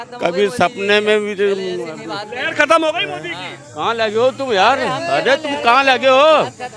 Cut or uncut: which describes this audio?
uncut